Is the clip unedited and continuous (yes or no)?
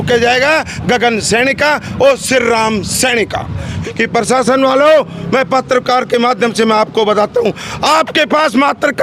no